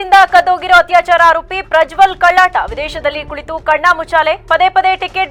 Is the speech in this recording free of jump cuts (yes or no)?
yes